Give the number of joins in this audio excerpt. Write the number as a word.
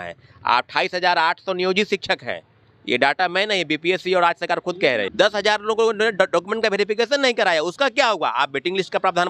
one